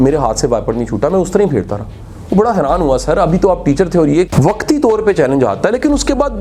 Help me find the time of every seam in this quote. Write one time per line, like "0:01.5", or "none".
0:04.3

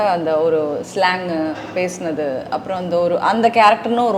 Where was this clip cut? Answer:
none

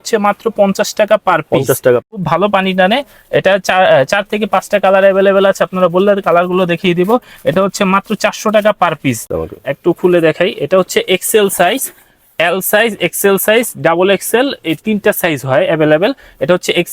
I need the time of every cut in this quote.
0:02.2
0:09.2

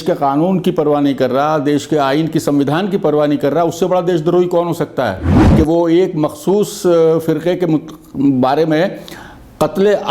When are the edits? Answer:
0:05.4

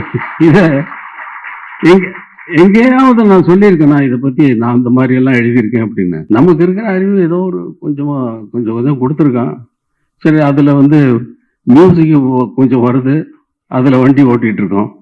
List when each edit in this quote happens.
none

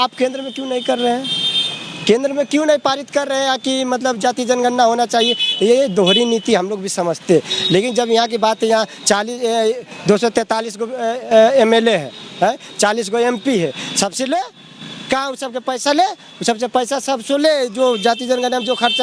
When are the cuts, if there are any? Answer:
none

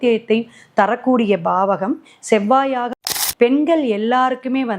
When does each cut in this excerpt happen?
0:03.2

